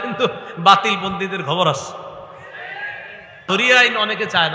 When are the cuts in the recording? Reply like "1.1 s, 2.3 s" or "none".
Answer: 3.4 s